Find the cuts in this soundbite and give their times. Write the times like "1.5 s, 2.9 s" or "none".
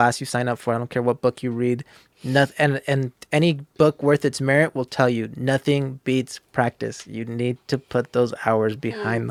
none